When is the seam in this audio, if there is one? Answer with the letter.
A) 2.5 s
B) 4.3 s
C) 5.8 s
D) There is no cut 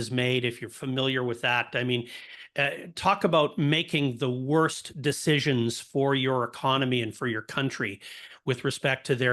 D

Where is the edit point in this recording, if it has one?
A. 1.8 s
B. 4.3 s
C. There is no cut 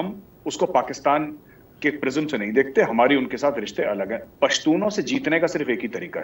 B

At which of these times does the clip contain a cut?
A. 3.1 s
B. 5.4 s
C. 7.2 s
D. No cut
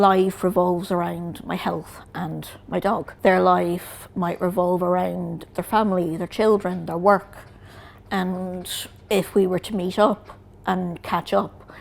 A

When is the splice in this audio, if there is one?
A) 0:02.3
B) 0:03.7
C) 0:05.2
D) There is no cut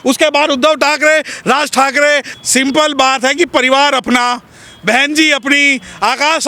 A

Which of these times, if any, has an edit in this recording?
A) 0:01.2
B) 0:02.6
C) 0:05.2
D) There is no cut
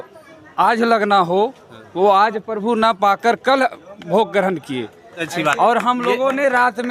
C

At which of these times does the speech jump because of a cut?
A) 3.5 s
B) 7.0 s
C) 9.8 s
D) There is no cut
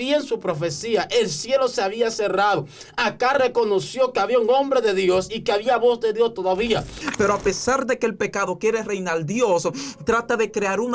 B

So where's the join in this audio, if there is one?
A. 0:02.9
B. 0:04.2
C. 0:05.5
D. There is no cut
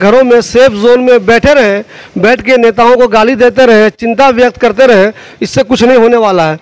D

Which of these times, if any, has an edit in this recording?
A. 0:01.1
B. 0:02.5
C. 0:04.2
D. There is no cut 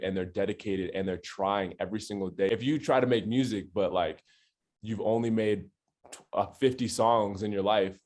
B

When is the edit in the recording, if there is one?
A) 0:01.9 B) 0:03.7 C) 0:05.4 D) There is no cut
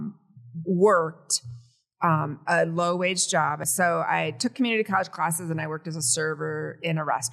B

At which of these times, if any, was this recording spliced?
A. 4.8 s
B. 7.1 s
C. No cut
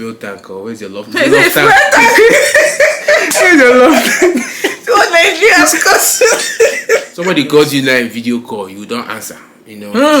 B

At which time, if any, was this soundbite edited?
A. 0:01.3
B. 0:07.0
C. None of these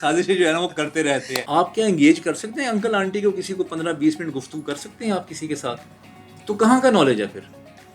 A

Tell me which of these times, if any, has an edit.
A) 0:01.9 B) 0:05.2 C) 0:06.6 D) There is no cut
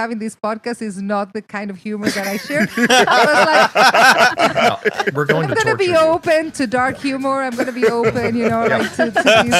D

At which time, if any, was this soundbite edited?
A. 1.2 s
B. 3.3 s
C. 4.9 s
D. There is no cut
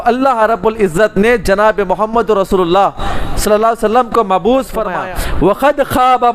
C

